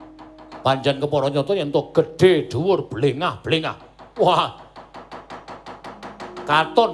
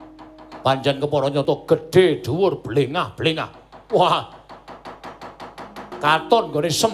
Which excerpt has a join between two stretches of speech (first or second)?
second